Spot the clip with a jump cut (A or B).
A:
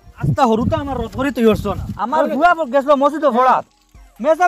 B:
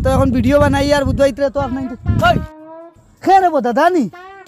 A